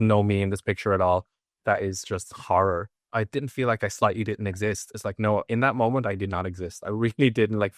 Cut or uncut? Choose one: cut